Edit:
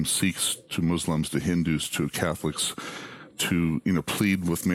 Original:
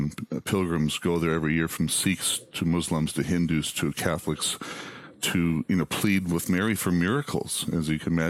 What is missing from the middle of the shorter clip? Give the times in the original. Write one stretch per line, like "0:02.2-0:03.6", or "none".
none